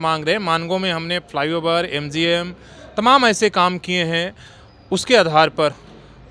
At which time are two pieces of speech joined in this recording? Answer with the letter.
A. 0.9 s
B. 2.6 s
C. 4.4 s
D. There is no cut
D